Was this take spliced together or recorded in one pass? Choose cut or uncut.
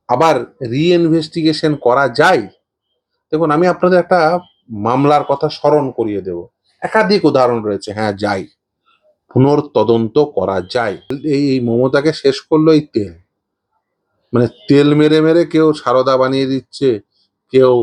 cut